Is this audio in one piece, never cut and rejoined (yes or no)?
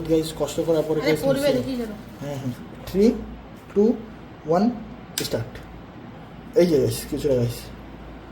no